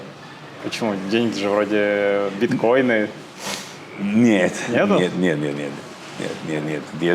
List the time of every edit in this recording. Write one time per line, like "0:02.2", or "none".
none